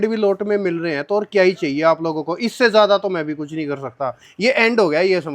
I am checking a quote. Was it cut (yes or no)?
no